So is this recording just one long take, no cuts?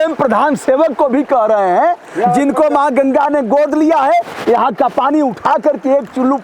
yes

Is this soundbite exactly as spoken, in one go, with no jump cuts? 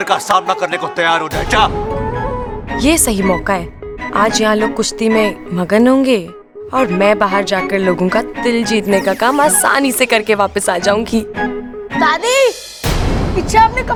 yes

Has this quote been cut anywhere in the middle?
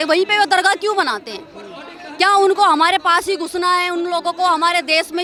no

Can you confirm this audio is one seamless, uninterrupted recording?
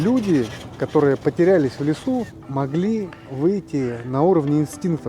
no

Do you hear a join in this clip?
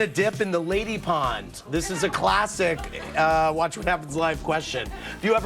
no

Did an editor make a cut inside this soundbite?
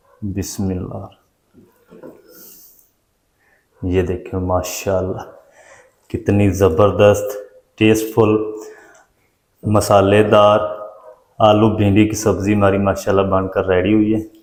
no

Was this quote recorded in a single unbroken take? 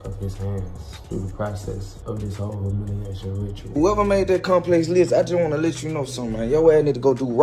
no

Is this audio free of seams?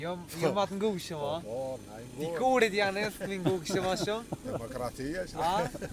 yes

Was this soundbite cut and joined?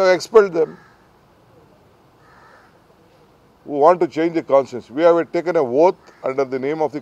yes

